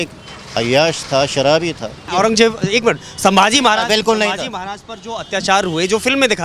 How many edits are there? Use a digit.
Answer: 1